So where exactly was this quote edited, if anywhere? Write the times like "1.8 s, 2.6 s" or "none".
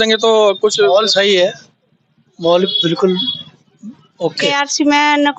4.5 s